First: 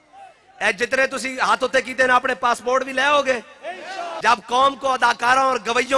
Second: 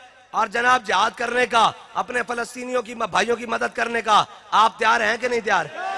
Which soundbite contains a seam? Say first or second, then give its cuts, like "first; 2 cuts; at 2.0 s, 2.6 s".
first; 1 cut; at 4.1 s